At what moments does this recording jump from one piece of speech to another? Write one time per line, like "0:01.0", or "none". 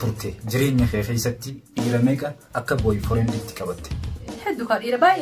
0:01.7
0:04.2